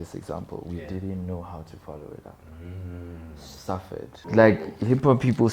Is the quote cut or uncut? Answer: cut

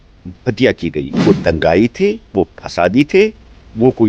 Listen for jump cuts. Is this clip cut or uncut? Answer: cut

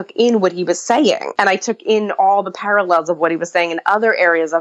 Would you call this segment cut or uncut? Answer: cut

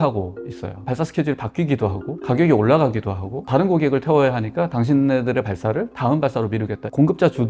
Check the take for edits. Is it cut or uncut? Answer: uncut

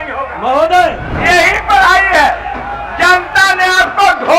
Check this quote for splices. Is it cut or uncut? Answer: cut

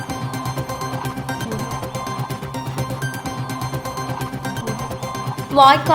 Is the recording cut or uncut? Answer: cut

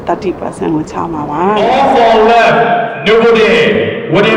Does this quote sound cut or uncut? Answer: cut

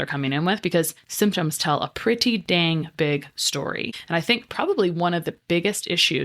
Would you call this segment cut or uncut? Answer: cut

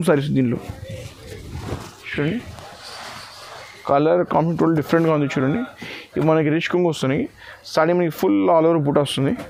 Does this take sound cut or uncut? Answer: uncut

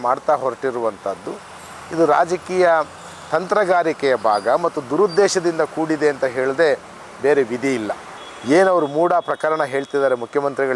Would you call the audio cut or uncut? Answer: cut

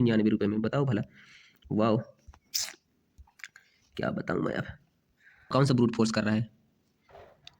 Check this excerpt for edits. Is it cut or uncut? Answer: cut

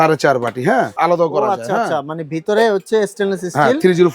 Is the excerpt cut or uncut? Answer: cut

